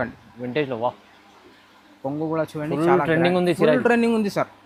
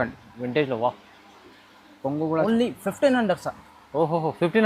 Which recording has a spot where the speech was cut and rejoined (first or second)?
second